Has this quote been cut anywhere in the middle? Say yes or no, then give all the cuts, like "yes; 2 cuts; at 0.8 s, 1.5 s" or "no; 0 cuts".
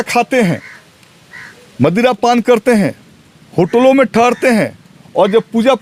no; 0 cuts